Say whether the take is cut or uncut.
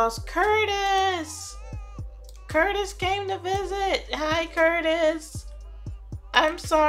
uncut